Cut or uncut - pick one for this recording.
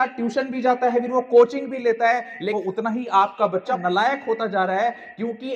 cut